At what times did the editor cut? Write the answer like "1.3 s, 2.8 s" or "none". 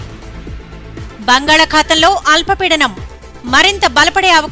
1.1 s